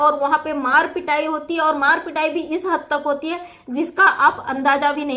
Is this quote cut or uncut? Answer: uncut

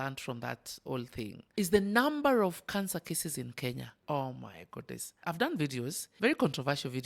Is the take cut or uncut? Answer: cut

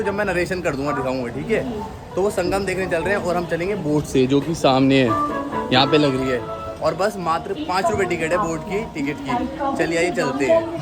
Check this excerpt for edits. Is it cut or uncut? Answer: uncut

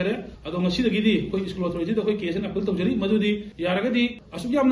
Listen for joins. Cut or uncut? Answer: uncut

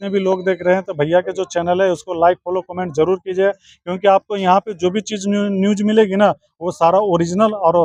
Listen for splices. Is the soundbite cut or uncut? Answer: uncut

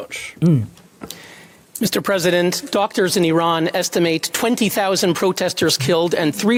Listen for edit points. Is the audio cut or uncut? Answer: uncut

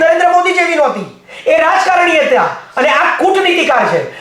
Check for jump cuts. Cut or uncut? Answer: uncut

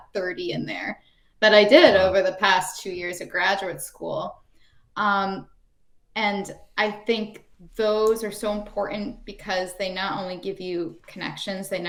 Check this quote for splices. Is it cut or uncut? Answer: uncut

